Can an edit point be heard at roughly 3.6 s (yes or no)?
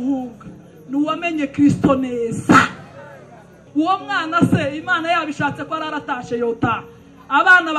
yes